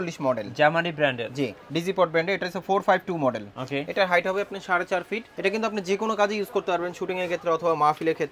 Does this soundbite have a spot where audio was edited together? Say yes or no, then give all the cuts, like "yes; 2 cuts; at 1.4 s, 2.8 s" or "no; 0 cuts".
yes; 2 cuts; at 1.6 s, 5.3 s